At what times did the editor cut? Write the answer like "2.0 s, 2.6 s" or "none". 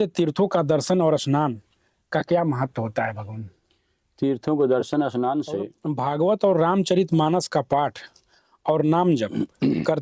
5.8 s